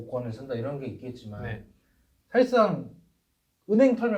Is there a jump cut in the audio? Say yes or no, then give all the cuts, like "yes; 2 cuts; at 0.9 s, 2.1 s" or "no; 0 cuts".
no; 0 cuts